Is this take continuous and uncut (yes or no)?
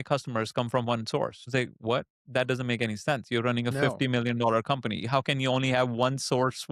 no